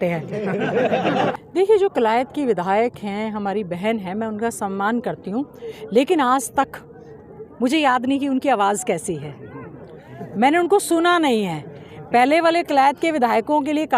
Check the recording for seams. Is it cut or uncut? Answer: cut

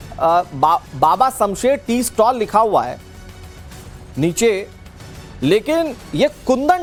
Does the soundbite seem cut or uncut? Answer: uncut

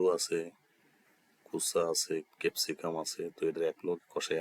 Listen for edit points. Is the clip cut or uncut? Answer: uncut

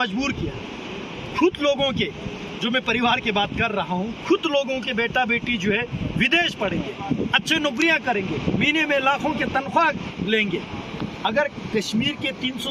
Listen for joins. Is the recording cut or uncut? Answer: uncut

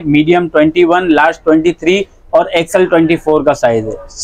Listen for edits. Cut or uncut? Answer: uncut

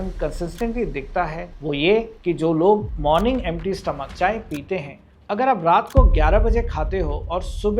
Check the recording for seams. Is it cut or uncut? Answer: cut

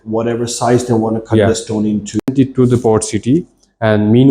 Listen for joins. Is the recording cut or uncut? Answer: cut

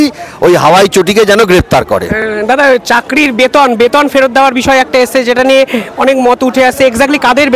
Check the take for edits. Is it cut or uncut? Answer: uncut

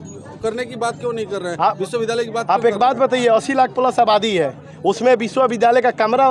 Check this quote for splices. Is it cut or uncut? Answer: uncut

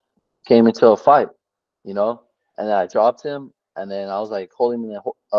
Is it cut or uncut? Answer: uncut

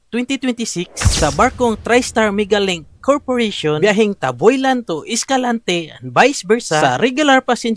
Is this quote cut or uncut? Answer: uncut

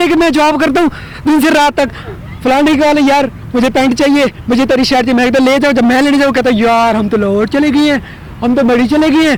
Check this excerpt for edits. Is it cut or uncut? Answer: uncut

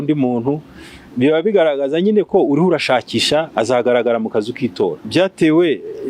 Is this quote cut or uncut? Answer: cut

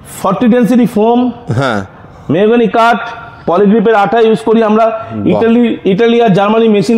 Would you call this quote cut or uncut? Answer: uncut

